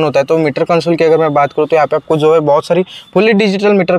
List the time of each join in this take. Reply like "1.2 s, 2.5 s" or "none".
none